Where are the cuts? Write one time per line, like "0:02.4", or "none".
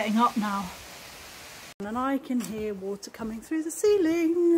0:01.8